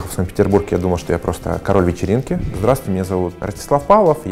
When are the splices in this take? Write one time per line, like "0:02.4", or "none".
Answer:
0:02.5
0:03.4